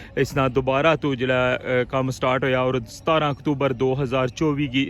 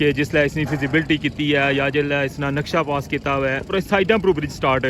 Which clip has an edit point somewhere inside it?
second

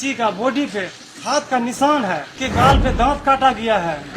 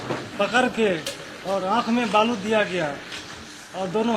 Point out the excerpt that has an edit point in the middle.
first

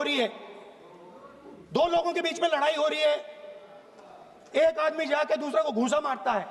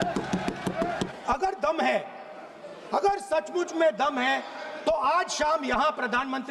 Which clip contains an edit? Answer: second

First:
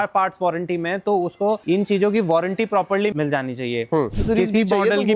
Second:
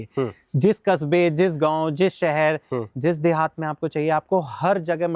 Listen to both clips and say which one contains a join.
first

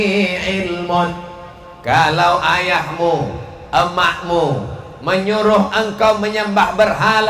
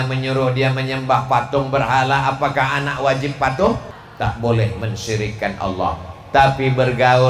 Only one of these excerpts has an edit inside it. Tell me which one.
second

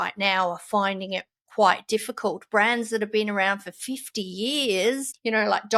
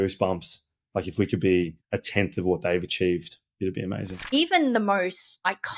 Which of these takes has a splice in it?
second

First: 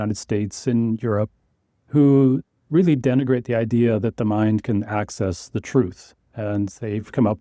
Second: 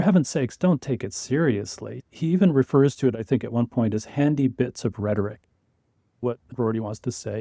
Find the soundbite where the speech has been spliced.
second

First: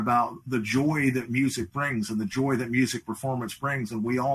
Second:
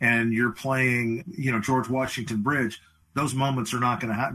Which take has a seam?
second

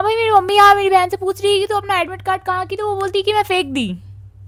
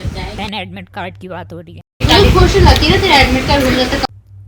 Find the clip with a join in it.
second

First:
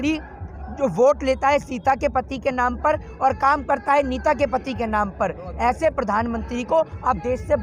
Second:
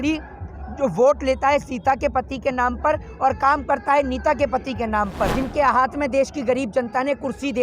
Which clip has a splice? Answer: second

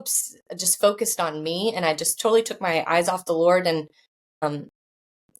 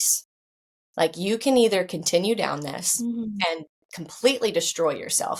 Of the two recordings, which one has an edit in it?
first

